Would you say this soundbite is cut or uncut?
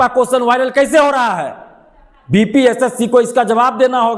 uncut